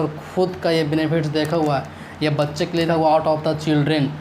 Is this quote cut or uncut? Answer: cut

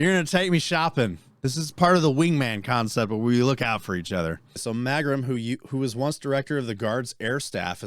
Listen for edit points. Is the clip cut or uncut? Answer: cut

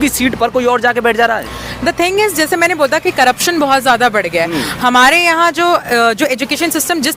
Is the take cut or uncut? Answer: uncut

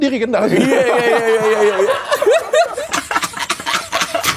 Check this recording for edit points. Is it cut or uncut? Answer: cut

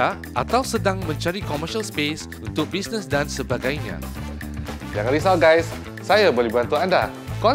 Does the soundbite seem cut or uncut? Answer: uncut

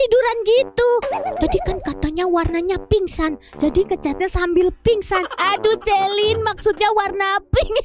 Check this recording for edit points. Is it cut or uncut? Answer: uncut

